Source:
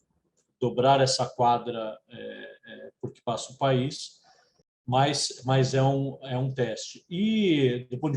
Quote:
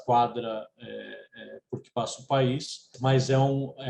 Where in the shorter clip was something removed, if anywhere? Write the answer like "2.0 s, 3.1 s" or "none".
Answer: 2.9 s

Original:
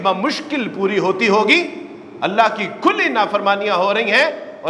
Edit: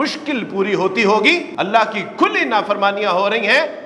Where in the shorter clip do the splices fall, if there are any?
1.5 s

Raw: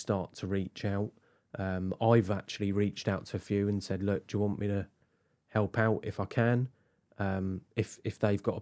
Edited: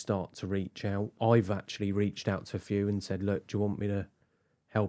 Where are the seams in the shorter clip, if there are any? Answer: 1.1 s

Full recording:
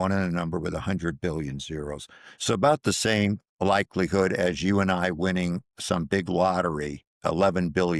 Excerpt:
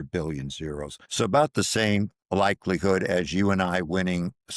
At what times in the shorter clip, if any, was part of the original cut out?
1.0 s

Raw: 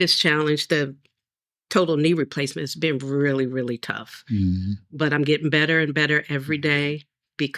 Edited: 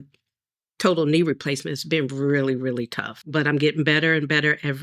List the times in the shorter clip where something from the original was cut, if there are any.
3.2 s

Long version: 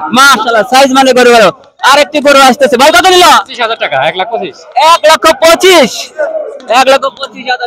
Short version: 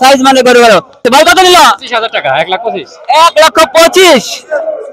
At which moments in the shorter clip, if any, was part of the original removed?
1.0 s

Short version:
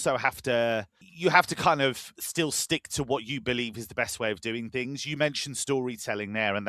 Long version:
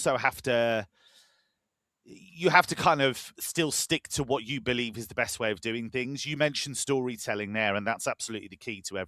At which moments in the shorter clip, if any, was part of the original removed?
1.0 s

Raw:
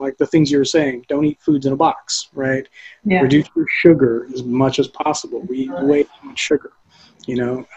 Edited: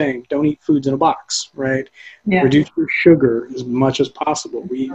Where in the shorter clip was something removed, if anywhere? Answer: none

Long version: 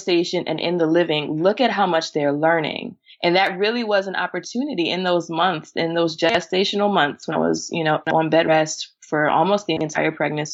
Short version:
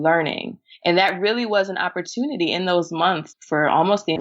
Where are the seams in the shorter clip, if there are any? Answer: 3.3 s

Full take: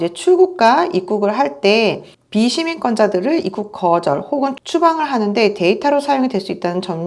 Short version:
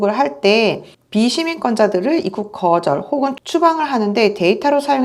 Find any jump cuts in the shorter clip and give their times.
none

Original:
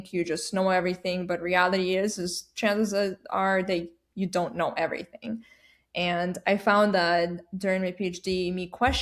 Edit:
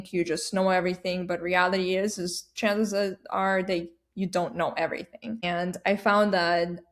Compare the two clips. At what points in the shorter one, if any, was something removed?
5.4 s

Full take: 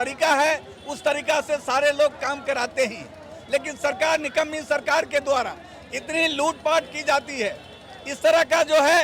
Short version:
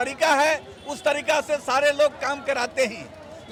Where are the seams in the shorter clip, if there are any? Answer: none

